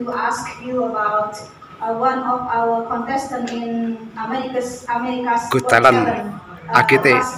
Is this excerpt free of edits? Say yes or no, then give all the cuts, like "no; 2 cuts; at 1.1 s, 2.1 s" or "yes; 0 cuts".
yes; 0 cuts